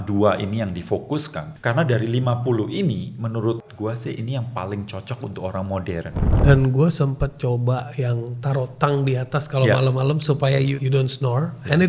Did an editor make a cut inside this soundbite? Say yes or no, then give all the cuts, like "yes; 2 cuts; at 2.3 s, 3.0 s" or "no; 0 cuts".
yes; 4 cuts; at 1.4 s, 3.7 s, 6.3 s, 10.7 s